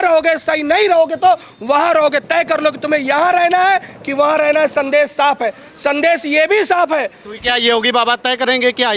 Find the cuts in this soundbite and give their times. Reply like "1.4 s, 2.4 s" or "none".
none